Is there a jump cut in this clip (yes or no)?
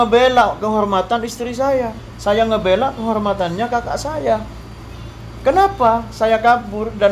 no